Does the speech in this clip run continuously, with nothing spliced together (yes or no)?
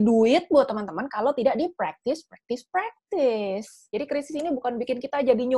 no